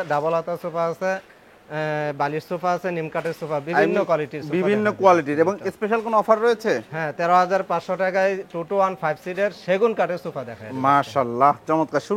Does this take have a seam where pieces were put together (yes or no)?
no